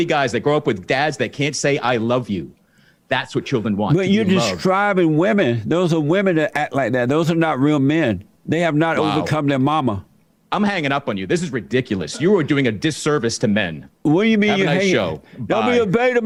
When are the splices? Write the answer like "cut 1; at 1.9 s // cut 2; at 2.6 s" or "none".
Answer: none